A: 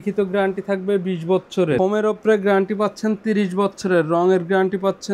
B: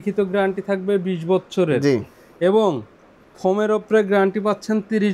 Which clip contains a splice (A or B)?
A